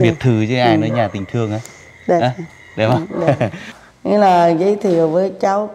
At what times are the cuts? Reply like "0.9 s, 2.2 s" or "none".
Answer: 3.7 s